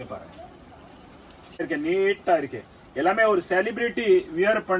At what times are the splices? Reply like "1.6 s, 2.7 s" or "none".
1.7 s